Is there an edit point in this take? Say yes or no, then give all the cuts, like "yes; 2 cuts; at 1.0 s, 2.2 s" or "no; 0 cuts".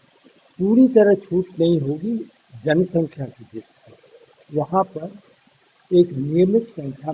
no; 0 cuts